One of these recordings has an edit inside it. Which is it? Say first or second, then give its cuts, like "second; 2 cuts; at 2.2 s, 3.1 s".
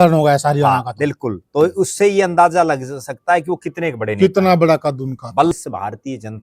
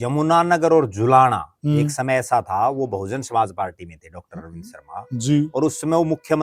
first; 1 cut; at 5.5 s